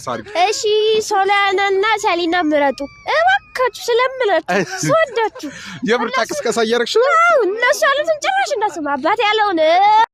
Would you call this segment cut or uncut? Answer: uncut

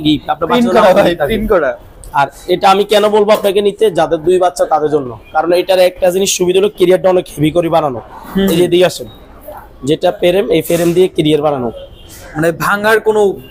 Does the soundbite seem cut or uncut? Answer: uncut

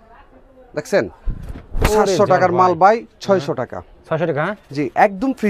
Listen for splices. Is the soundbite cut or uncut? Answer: cut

